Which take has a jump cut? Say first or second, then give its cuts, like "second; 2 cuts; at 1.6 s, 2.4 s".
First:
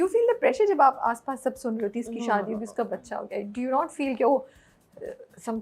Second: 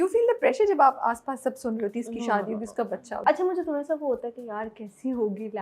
second; 1 cut; at 3.2 s